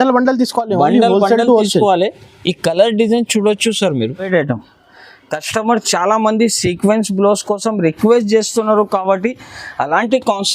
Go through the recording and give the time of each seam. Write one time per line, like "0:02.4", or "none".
0:04.3

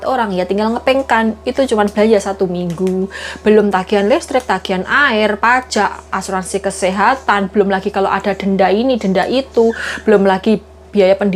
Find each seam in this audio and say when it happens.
none

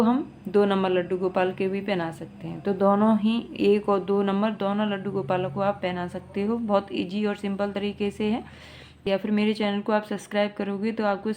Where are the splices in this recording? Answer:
0:09.1

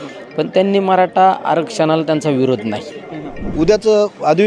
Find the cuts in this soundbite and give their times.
0:03.4

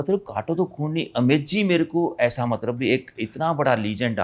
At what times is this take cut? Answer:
none

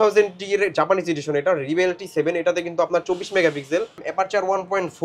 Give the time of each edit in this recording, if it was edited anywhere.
0:04.0

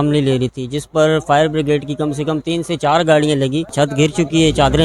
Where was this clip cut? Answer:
0:03.7

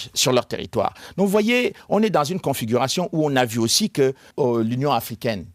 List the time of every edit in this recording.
0:04.3

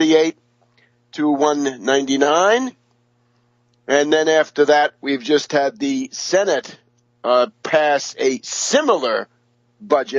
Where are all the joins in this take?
0:07.9

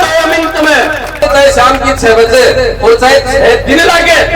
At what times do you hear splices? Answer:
0:01.2

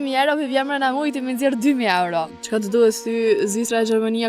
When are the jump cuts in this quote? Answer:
0:02.4

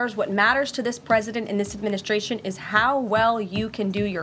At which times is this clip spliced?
none

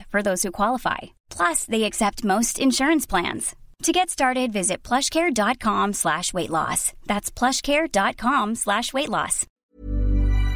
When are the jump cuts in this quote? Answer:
0:09.5

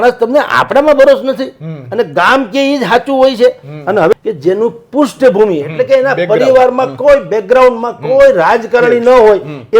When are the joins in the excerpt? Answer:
0:04.1

